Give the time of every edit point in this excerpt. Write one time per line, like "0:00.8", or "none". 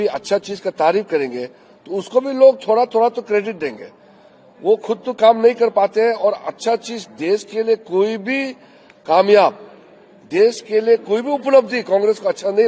none